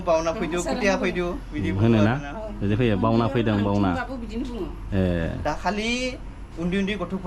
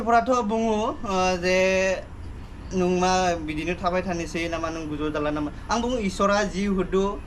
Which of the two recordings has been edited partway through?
first; 1 cut; at 5.4 s

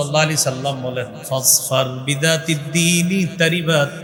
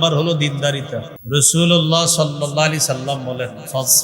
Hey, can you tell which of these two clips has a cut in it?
second; 1 cut; at 1.1 s

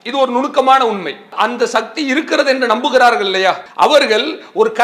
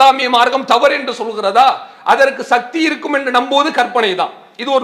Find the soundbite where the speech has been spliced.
first; 2 cuts; at 1.3 s, 3.7 s

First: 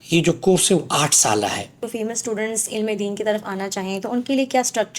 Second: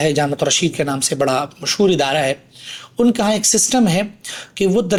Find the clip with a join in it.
first; 1 cut; at 1.8 s

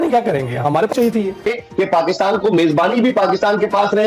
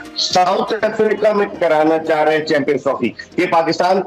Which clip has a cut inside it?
first; 1 cut; at 1.5 s

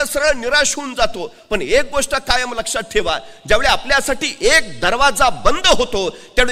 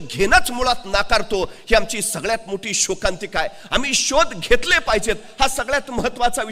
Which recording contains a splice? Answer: first; 1 cut; at 2.5 s

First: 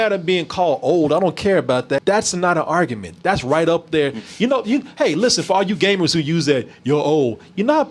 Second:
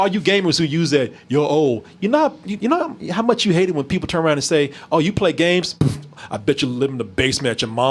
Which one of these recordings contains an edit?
first; 1 cut; at 2.0 s

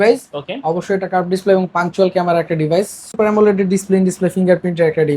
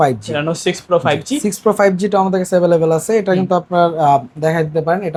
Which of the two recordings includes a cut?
first; 1 cut; at 3.2 s

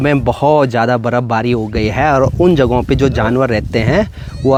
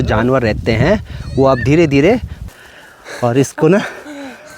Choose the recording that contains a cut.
second; 1 cut; at 2.4 s

